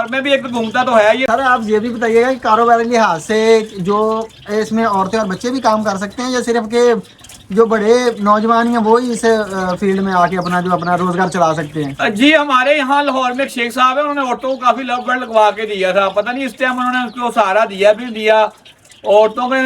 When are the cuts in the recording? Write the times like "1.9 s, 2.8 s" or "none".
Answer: 1.3 s